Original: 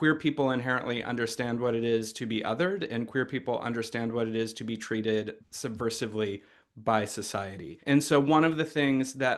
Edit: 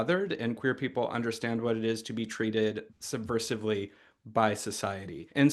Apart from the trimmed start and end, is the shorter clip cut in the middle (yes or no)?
no